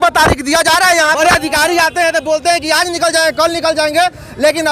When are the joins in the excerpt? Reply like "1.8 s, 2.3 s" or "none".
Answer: 1.2 s